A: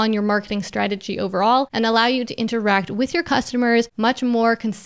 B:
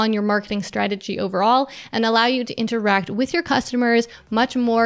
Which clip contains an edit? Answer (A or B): A